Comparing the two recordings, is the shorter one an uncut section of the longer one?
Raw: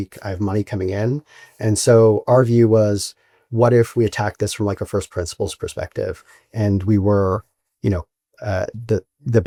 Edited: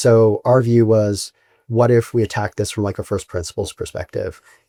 yes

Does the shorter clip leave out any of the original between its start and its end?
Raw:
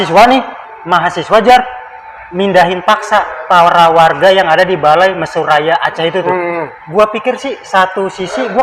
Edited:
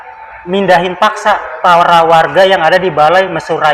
no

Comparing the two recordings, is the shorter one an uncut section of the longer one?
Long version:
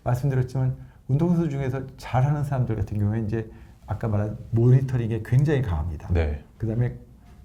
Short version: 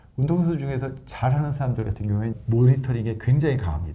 no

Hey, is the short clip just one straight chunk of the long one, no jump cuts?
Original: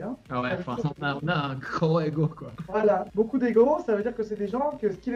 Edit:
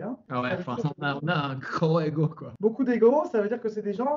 no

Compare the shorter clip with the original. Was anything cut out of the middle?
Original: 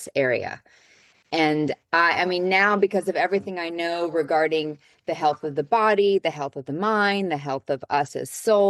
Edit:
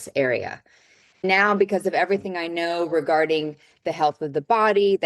yes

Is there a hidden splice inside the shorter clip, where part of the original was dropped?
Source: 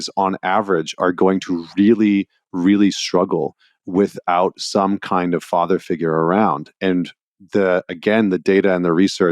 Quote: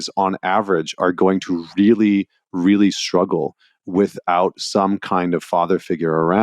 no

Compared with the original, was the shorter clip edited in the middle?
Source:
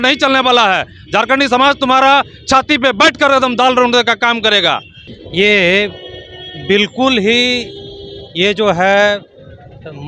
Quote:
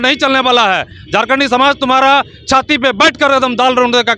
no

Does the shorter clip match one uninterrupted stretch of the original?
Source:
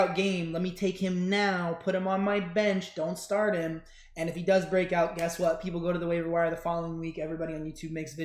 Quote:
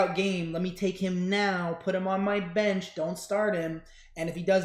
yes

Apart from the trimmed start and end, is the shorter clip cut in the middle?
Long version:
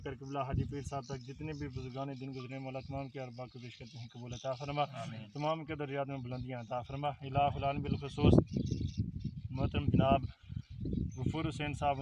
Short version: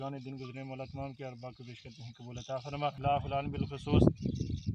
yes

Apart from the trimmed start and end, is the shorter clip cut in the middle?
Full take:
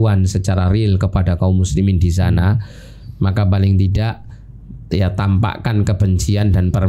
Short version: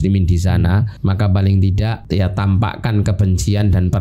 yes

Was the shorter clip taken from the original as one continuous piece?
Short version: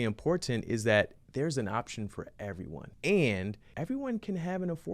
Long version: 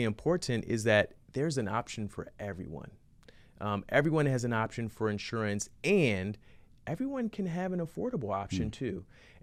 no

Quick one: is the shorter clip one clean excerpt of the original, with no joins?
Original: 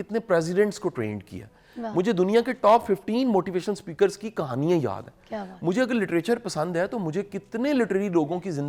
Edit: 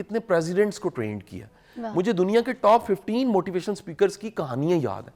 yes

